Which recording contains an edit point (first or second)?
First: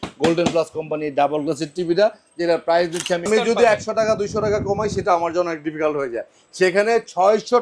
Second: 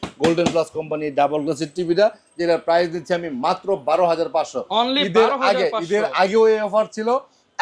first